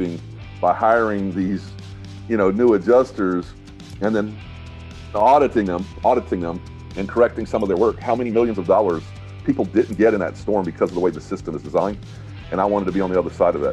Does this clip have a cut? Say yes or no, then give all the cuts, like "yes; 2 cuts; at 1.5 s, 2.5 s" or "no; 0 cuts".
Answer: no; 0 cuts